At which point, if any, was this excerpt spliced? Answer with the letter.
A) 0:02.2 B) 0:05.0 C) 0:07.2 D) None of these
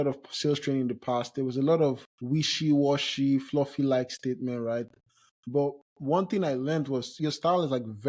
C